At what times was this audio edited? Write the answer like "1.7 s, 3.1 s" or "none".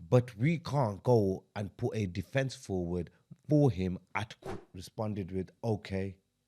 4.4 s